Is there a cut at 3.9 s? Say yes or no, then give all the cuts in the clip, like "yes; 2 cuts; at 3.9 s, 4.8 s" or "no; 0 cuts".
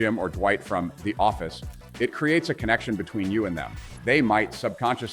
no; 0 cuts